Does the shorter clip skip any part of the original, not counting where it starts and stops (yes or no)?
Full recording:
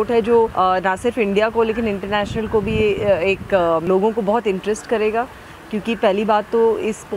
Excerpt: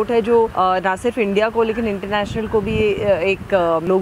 no